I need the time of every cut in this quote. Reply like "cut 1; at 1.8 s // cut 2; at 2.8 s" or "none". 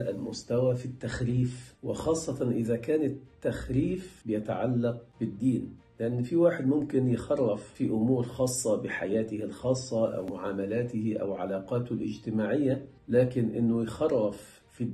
none